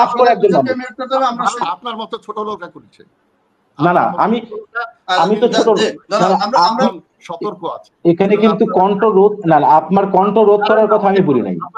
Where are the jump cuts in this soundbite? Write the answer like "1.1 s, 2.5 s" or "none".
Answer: 1.6 s, 6.9 s

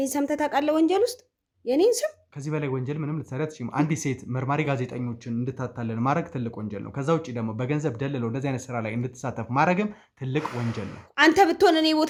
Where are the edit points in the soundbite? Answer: none

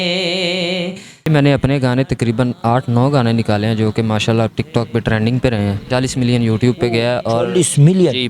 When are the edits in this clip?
1.3 s, 4.6 s, 5.9 s

